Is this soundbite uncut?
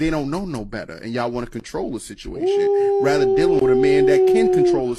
no; 1 cut; at 1.6 s

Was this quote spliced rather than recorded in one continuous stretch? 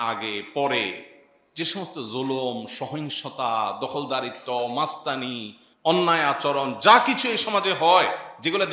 no; 0 cuts

